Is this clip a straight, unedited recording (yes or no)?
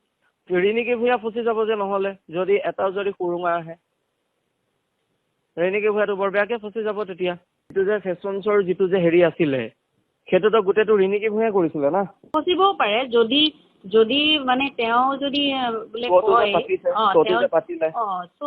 no